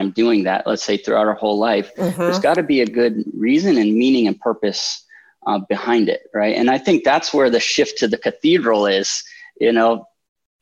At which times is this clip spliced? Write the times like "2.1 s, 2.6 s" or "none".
none